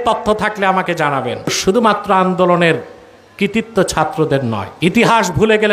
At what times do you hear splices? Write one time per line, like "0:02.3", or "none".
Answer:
0:01.6
0:04.7